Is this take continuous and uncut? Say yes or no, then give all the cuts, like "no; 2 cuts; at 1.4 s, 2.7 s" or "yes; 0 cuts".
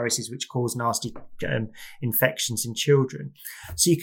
yes; 0 cuts